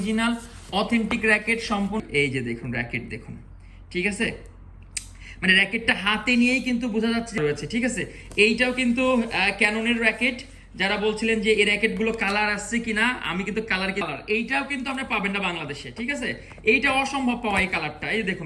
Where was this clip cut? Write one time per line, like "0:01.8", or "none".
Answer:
0:02.0
0:07.4
0:14.0